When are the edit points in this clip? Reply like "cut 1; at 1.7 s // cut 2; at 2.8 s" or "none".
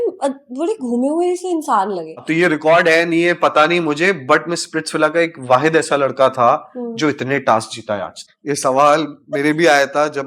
cut 1; at 2.3 s // cut 2; at 8.3 s